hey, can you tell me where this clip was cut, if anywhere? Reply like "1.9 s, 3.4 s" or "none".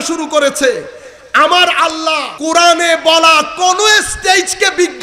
2.3 s

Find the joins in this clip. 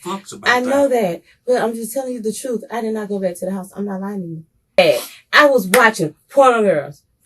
4.8 s

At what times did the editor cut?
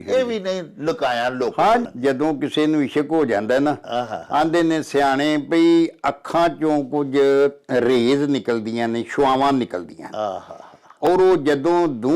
1.8 s

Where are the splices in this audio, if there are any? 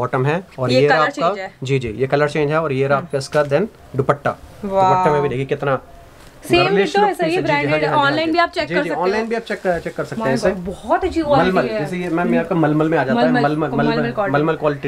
none

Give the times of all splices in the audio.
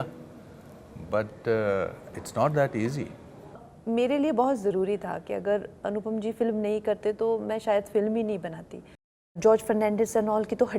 3.7 s, 9.4 s

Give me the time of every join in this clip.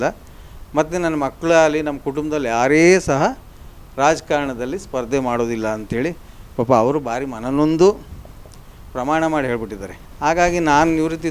none

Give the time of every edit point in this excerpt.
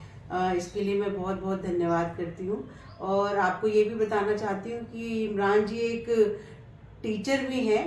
none

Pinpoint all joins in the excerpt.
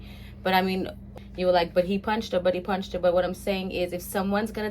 1.1 s

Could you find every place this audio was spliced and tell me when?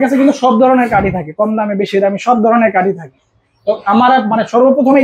none

